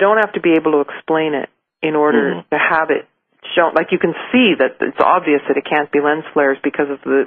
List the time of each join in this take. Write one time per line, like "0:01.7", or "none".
0:02.6